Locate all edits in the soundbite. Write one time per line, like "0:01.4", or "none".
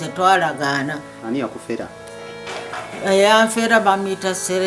0:01.1